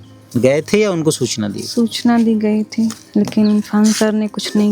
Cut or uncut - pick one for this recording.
uncut